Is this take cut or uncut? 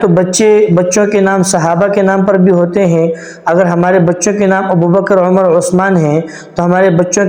uncut